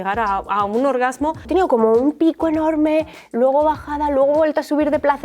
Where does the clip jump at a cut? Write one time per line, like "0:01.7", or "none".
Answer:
0:01.5